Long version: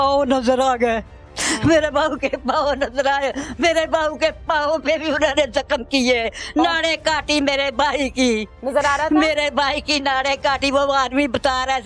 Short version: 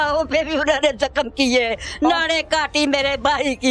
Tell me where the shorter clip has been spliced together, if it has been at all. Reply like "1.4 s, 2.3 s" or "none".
none